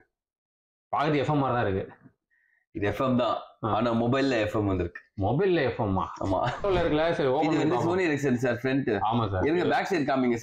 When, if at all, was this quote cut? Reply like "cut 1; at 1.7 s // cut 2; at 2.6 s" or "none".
cut 1; at 6.6 s